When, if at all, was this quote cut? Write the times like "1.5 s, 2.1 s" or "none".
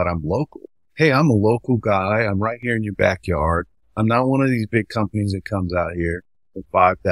none

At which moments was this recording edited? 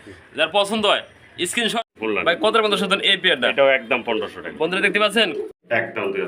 1.8 s, 5.5 s

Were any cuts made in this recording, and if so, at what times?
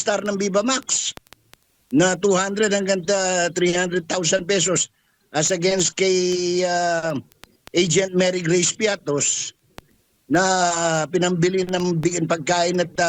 none

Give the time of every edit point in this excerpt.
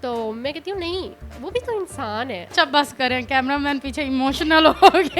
2.5 s

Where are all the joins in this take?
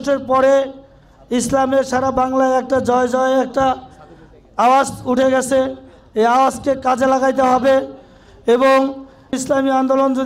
9.3 s

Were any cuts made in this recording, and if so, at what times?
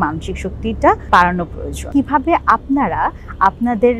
1.9 s

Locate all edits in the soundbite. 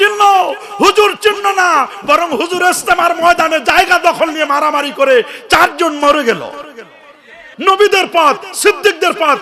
7.5 s

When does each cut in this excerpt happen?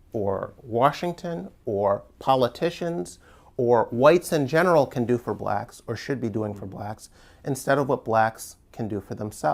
none

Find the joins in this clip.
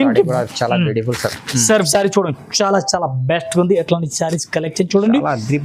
1.9 s

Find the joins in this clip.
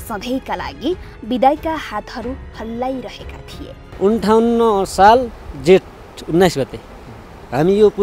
3.8 s

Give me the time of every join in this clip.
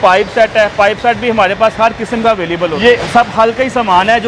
2.8 s

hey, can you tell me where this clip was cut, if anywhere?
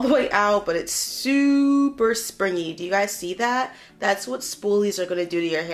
none

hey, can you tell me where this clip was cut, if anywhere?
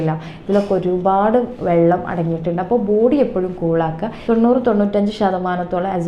4.1 s

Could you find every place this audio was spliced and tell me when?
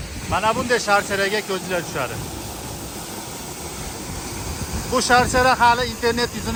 none

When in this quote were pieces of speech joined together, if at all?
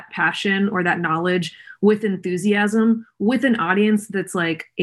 none

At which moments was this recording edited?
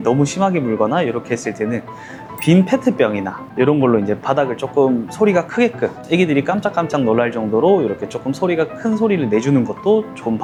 none

